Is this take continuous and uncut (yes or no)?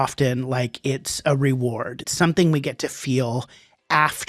no